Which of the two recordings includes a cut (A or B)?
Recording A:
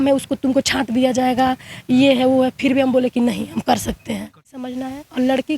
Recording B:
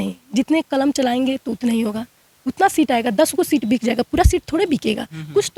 A